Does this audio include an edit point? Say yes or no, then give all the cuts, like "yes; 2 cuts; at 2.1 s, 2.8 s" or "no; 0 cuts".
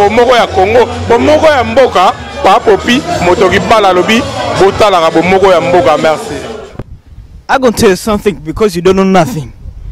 no; 0 cuts